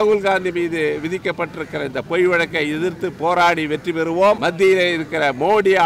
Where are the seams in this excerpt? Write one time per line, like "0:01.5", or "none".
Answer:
0:04.4